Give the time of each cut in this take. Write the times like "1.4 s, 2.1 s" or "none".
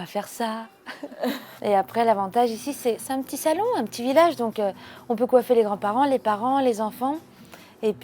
none